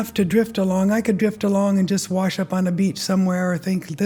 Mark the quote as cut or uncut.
uncut